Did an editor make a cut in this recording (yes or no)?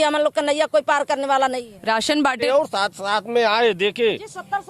yes